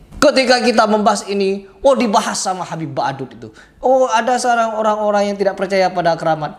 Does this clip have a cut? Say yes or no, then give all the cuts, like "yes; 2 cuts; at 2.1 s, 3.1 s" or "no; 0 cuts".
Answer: no; 0 cuts